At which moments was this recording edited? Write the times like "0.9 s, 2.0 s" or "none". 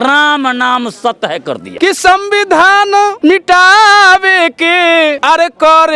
1.7 s, 3.1 s, 5.2 s